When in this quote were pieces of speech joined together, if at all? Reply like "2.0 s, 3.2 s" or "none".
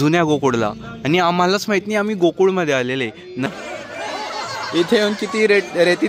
3.5 s